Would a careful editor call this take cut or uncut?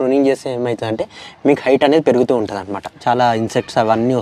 cut